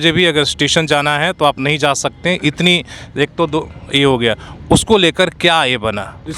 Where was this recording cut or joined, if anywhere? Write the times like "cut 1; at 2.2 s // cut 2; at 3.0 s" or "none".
none